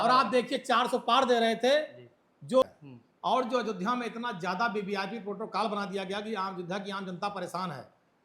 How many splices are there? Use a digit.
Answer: 1